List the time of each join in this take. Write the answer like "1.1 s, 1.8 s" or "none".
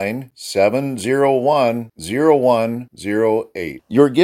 none